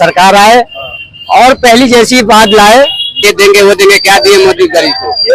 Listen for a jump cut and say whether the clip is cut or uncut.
cut